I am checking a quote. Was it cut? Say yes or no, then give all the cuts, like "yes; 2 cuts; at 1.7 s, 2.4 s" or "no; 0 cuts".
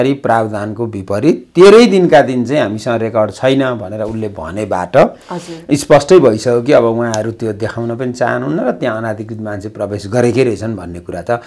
no; 0 cuts